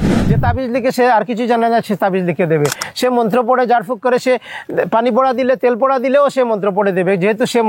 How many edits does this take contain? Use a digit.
0